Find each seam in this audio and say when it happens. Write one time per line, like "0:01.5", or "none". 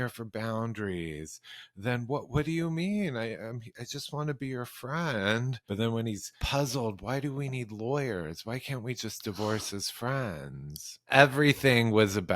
0:05.6
0:06.3
0:11.1